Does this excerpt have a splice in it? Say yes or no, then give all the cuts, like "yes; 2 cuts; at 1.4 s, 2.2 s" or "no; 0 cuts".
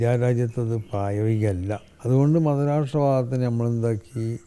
yes; 1 cut; at 1.9 s